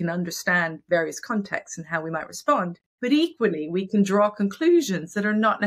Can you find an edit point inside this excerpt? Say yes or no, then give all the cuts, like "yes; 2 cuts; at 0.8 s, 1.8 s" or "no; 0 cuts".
yes; 1 cut; at 2.8 s